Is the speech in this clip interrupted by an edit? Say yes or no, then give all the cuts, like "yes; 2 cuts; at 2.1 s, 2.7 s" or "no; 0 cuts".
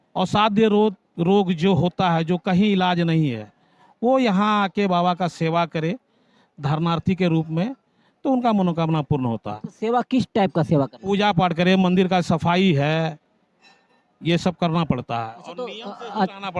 no; 0 cuts